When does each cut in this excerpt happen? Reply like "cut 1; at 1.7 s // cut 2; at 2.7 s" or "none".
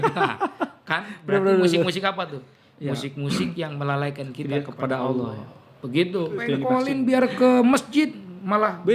cut 1; at 6.7 s